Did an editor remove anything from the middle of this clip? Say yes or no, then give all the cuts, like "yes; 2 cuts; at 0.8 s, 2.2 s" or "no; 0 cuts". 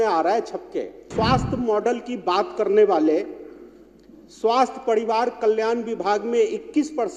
yes; 1 cut; at 1.1 s